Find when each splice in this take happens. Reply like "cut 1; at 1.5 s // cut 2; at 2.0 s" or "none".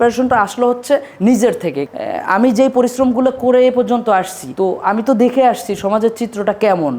cut 1; at 1.8 s // cut 2; at 4.4 s